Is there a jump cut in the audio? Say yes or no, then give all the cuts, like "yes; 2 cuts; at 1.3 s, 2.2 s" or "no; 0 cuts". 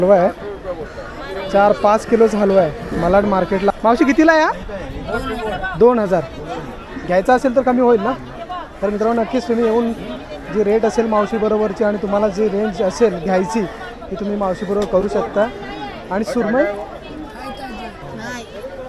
no; 0 cuts